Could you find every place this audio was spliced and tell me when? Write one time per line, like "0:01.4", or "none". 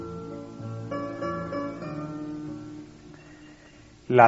0:02.3